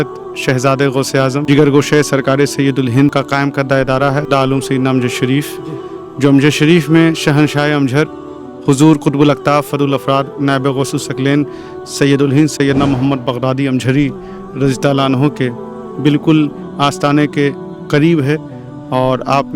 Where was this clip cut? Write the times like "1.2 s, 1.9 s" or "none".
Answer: 1.4 s, 3.1 s

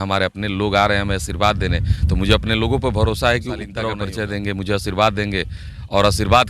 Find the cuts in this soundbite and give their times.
3.9 s

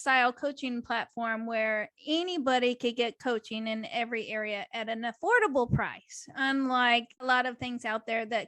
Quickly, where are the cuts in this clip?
7.2 s

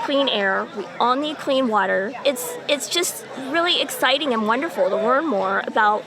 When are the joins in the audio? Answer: 2.1 s

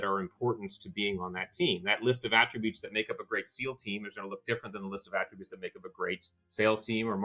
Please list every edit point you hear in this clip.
6.4 s

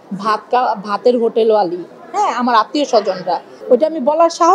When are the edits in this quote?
3.5 s

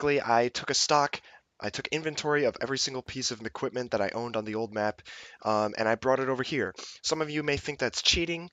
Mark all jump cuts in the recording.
2.0 s

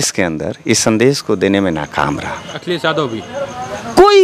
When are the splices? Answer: 2.5 s

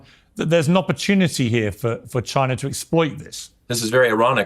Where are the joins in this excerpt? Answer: 3.5 s

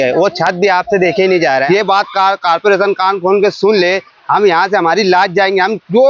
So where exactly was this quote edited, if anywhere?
1.6 s

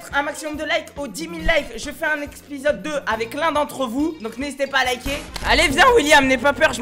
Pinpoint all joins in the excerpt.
5.3 s

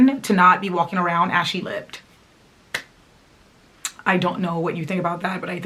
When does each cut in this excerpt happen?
none

